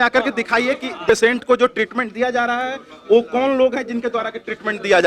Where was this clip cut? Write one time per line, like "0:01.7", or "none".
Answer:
0:01.0